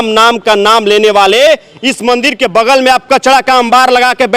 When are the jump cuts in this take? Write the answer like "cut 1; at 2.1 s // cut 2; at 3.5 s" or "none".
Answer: none